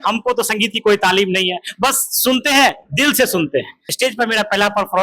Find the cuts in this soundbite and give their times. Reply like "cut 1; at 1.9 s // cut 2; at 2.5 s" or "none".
cut 1; at 3.9 s